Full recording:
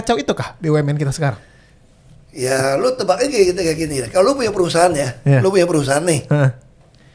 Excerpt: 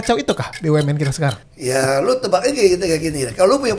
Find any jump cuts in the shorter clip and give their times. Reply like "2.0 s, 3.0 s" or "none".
1.5 s